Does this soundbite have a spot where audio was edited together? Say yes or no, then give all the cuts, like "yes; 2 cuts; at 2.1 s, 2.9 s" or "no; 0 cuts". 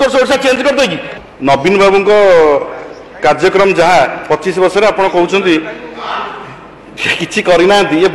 yes; 1 cut; at 1.1 s